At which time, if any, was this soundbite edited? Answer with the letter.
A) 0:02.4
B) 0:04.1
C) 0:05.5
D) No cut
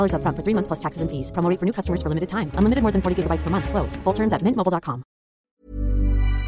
C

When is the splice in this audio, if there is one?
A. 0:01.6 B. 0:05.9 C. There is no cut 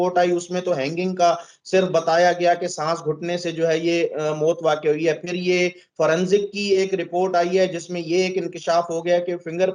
C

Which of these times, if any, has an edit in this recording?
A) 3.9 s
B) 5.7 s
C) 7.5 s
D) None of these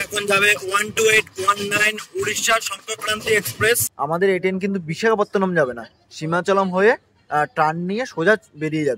A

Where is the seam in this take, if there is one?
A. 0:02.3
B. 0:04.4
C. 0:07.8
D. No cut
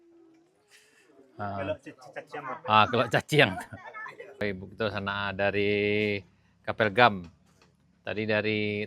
B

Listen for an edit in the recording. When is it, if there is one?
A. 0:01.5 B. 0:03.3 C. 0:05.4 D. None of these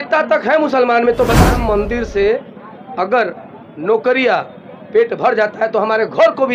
A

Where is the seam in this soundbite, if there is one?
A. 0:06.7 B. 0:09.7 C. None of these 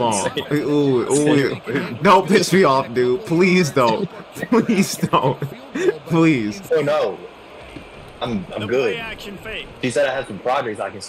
A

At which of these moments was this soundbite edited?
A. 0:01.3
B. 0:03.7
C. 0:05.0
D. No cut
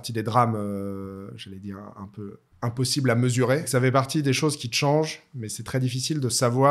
B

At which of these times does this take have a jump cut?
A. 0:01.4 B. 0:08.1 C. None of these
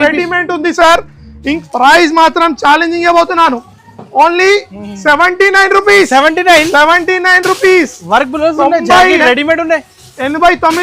A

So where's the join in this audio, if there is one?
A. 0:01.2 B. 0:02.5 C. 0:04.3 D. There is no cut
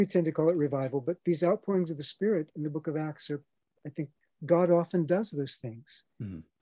C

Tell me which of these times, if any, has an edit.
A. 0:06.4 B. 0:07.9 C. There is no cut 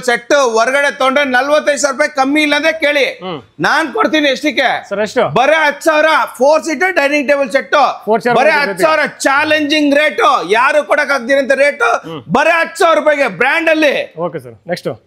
C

